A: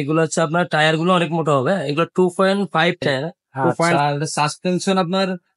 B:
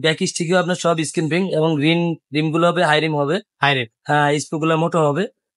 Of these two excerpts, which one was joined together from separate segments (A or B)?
A